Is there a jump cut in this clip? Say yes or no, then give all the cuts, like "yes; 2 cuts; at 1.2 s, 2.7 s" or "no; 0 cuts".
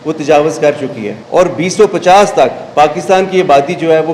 yes; 2 cuts; at 1.1 s, 2.6 s